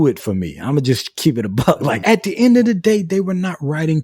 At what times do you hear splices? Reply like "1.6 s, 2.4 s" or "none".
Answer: 2.0 s